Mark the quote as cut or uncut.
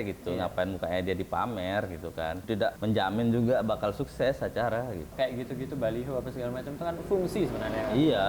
cut